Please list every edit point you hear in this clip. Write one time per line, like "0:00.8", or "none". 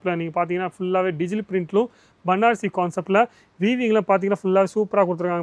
none